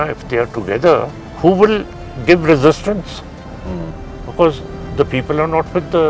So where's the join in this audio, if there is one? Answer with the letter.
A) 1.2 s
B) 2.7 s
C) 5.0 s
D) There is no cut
A